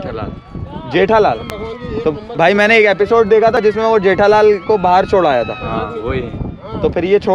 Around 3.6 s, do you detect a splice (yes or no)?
yes